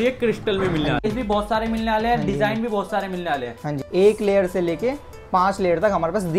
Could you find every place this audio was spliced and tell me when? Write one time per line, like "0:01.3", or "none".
0:01.0
0:03.8